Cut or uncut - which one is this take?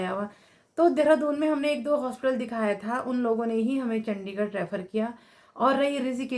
uncut